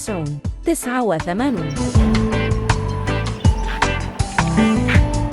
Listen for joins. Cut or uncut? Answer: cut